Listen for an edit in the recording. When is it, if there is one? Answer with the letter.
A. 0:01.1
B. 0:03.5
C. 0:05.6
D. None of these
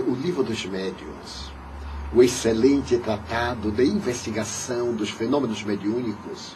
B